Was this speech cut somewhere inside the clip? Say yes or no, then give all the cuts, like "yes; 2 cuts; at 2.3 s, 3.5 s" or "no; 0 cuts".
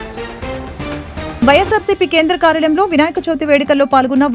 yes; 1 cut; at 1.4 s